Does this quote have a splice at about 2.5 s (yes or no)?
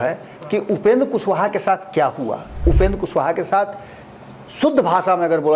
yes